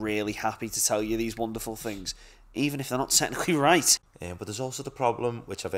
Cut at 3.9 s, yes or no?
yes